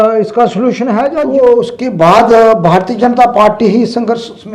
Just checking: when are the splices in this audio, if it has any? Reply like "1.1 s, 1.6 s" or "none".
1.1 s